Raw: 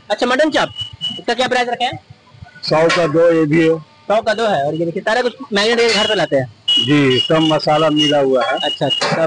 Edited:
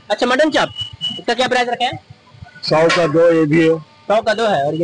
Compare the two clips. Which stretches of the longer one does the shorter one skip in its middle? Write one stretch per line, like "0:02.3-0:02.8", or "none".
none